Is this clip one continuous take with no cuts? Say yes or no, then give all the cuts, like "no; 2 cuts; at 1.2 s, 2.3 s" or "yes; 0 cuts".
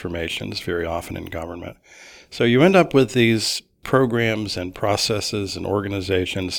no; 1 cut; at 3.8 s